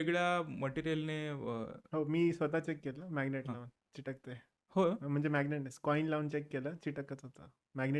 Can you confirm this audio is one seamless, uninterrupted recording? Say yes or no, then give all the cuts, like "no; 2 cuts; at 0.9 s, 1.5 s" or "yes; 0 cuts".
yes; 0 cuts